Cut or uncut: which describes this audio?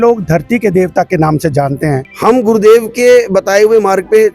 cut